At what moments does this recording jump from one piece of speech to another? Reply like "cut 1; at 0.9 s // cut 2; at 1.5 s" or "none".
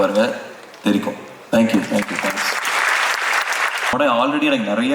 cut 1; at 3.9 s